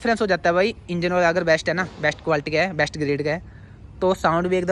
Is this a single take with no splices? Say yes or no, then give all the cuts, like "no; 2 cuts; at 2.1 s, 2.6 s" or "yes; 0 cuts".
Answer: yes; 0 cuts